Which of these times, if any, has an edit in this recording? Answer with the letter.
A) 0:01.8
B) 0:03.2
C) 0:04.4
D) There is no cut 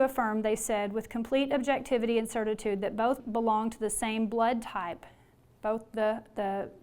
B